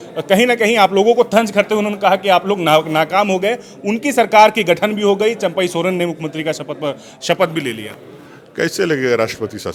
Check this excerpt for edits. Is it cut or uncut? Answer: uncut